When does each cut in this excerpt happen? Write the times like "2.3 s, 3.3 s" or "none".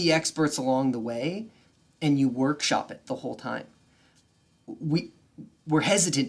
none